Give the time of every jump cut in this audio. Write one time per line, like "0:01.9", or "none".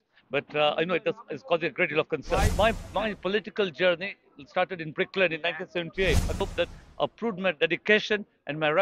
0:02.5
0:06.4